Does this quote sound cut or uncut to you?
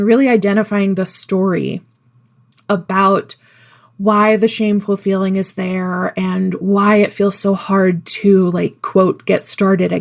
uncut